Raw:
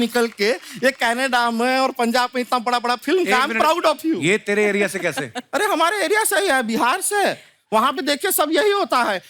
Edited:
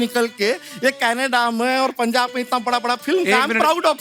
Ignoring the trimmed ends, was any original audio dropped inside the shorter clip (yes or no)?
no